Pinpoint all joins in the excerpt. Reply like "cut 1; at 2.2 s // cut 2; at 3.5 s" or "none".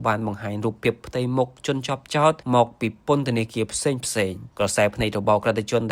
cut 1; at 2.4 s // cut 2; at 4.4 s

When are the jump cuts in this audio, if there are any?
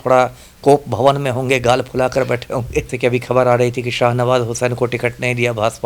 cut 1; at 2.9 s

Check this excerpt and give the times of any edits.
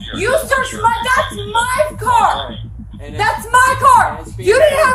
cut 1; at 2.0 s

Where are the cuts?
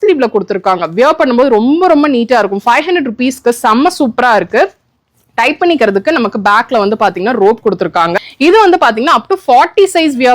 cut 1; at 8.1 s

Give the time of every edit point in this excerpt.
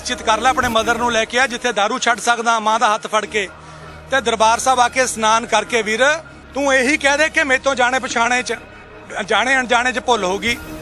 cut 1; at 6.4 s

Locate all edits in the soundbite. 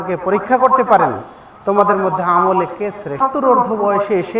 cut 1; at 3.2 s

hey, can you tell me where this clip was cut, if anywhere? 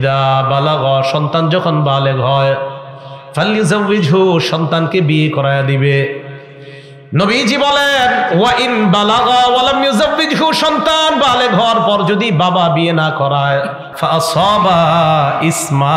cut 1; at 13.9 s

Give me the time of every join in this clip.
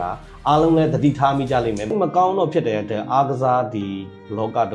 cut 1; at 1.9 s

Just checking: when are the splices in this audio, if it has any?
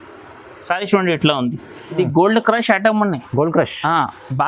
cut 1; at 1.8 s

